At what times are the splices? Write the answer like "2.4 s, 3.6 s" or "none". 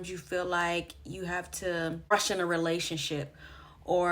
2.1 s